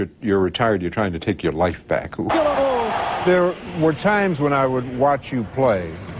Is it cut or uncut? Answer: uncut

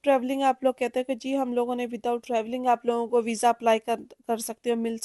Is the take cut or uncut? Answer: uncut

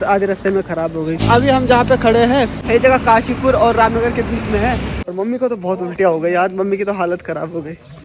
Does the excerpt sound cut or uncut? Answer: cut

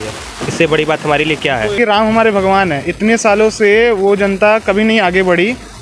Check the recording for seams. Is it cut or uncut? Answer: cut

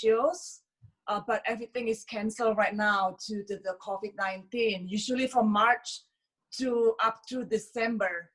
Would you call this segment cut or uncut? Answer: uncut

